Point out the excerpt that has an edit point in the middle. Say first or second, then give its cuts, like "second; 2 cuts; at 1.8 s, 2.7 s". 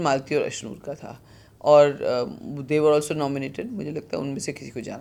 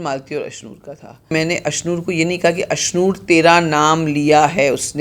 second; 1 cut; at 1.3 s